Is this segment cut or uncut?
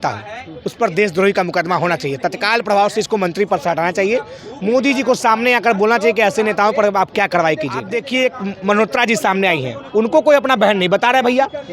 cut